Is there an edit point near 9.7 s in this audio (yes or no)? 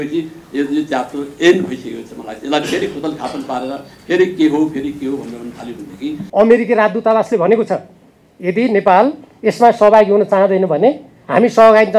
no